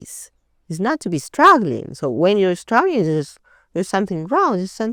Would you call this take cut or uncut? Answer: uncut